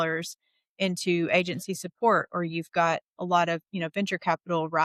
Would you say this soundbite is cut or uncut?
uncut